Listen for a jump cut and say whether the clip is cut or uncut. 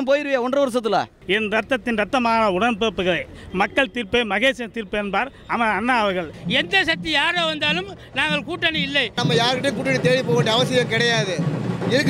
cut